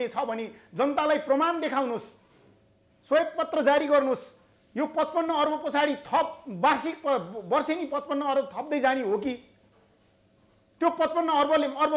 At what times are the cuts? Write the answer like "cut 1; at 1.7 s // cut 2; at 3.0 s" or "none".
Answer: none

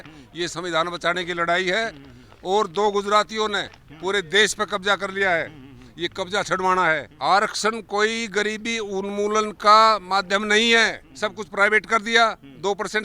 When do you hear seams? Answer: cut 1; at 7.1 s // cut 2; at 11.0 s

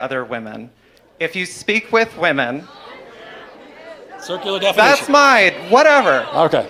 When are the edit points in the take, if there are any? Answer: none

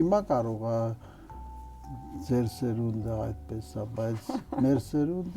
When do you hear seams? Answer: none

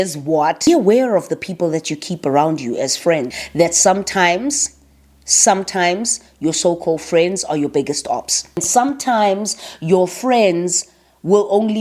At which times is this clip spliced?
cut 1; at 0.7 s // cut 2; at 3.4 s // cut 3; at 8.6 s

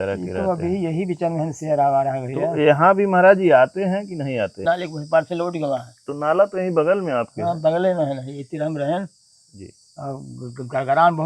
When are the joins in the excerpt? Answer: cut 1; at 4.6 s

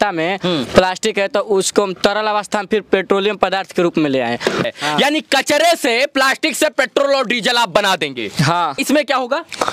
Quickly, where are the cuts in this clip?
cut 1; at 4.6 s // cut 2; at 8.8 s

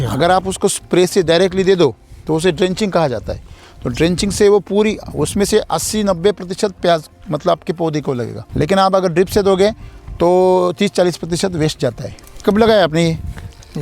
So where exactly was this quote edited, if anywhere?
cut 1; at 8.4 s // cut 2; at 12.4 s

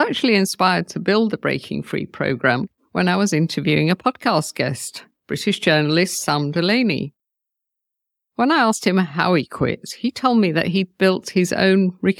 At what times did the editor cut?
cut 1; at 2.8 s

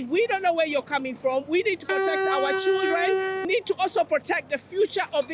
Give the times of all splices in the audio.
cut 1; at 3.5 s

